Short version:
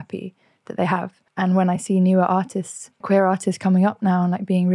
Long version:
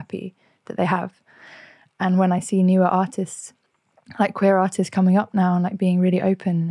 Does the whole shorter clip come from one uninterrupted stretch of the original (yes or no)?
no